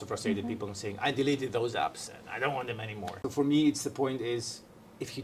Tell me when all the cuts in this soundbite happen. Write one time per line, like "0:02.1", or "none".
0:03.2